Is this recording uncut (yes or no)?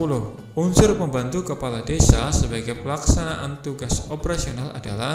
yes